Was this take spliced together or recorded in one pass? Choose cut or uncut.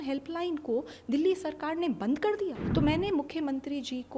cut